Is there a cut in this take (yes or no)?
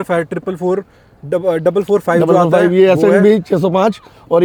no